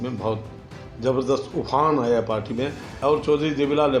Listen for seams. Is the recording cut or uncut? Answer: cut